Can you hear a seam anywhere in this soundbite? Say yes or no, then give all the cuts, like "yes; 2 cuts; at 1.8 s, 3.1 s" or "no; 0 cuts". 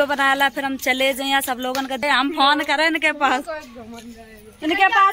yes; 1 cut; at 2.0 s